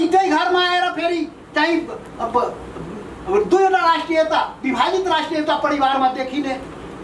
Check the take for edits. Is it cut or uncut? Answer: uncut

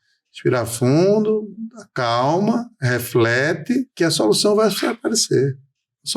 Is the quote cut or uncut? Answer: cut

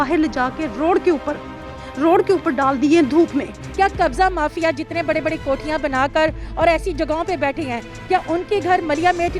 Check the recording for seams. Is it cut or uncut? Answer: cut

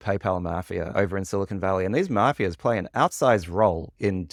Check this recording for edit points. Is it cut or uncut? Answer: uncut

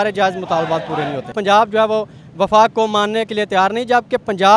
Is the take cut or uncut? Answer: cut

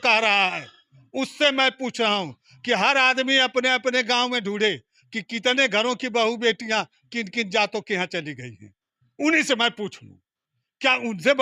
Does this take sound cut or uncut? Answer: uncut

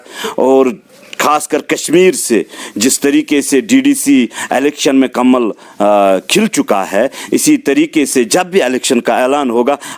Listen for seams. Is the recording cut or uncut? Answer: uncut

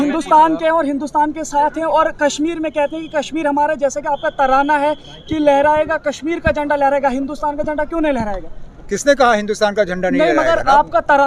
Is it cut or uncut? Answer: uncut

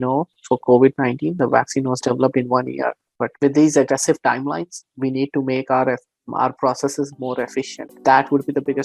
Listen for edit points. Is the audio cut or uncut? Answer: uncut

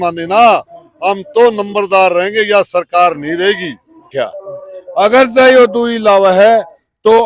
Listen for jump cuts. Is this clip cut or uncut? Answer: cut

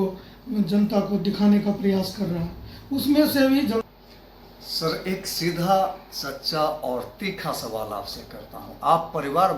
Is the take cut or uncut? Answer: cut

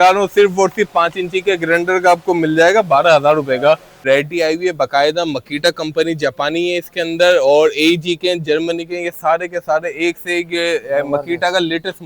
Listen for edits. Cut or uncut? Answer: cut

